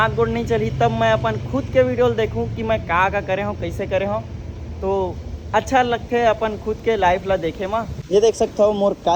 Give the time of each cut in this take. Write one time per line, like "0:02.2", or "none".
none